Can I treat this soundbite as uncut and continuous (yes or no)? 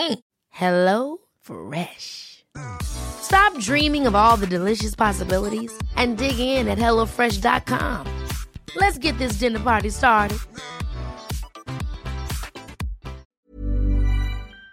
no